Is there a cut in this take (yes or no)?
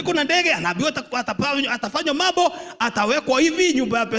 no